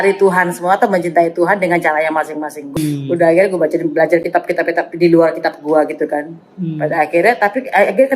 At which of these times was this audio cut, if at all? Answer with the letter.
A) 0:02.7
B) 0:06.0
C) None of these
A